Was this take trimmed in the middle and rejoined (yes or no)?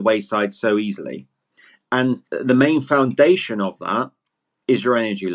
yes